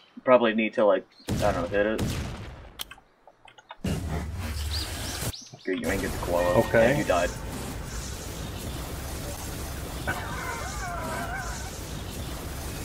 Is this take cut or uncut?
uncut